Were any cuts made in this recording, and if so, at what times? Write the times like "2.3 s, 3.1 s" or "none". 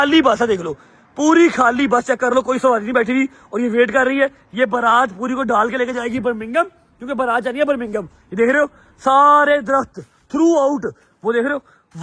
none